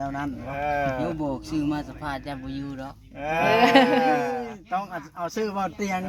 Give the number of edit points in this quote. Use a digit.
0